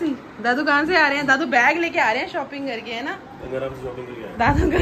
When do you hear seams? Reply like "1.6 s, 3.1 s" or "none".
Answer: none